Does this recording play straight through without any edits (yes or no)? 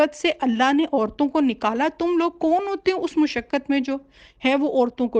yes